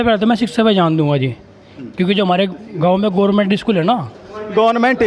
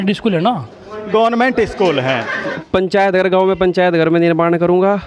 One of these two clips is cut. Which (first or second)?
second